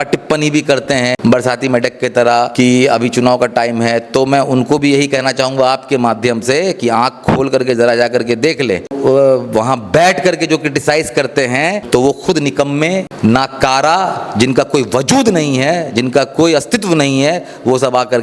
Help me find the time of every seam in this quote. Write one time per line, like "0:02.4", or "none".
0:01.2
0:02.5
0:08.9
0:11.8
0:13.1